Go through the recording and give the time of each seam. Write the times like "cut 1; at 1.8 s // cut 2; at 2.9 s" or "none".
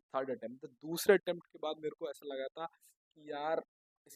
none